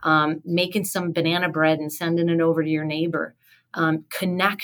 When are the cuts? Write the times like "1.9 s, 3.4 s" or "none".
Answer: none